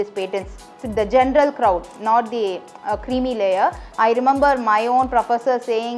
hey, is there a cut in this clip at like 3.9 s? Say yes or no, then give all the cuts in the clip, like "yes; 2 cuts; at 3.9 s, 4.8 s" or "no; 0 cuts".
yes; 1 cut; at 3.9 s